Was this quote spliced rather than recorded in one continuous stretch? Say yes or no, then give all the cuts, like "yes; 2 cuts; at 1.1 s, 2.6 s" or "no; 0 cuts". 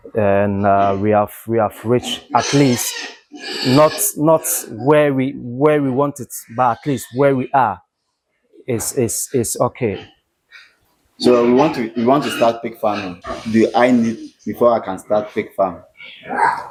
no; 0 cuts